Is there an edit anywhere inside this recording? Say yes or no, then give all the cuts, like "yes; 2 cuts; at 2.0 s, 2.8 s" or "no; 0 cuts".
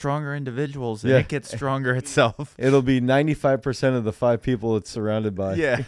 no; 0 cuts